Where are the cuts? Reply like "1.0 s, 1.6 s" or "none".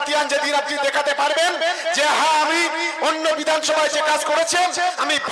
none